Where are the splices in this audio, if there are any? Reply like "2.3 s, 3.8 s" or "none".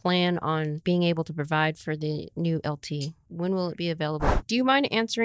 0.8 s, 3.2 s, 4.3 s